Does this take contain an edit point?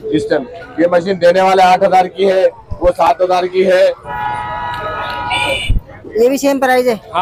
yes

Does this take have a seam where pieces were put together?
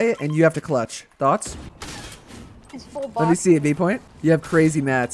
yes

